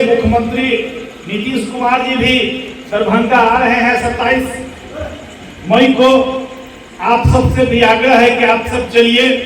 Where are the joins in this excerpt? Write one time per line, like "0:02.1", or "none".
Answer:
none